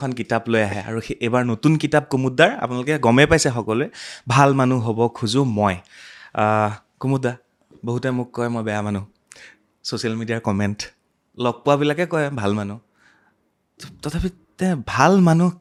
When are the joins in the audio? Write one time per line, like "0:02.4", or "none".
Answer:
none